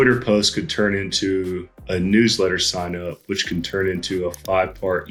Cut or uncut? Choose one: uncut